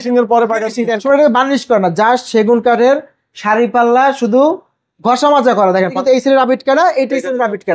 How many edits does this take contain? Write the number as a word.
two